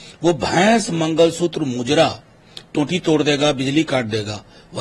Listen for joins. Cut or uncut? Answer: uncut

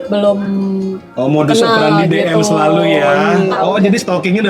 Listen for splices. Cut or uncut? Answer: cut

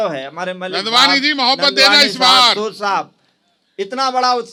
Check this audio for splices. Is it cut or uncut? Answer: uncut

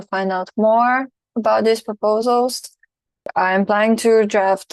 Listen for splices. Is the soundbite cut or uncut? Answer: cut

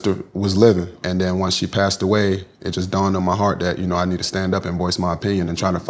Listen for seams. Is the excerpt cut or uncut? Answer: cut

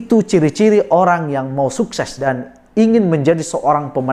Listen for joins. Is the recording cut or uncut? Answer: cut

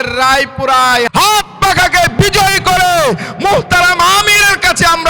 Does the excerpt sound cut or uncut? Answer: cut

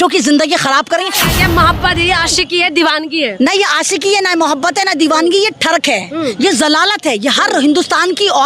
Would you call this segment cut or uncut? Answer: cut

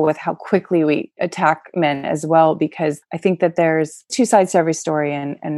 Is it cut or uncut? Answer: cut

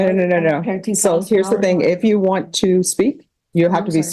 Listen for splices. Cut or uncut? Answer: uncut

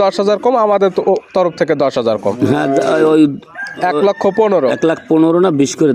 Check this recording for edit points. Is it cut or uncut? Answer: uncut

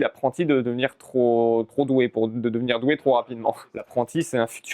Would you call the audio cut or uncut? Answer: cut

